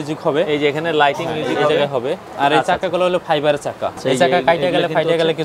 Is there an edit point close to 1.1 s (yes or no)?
no